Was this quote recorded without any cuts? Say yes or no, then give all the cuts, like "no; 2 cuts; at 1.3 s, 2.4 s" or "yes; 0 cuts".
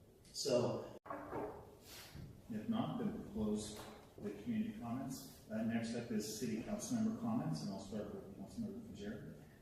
no; 1 cut; at 1.1 s